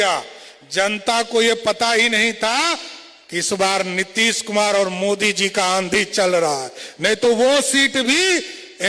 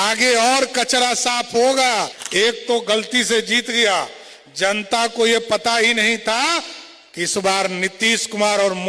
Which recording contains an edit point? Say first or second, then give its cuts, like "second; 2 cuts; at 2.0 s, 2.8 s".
second; 1 cut; at 2.2 s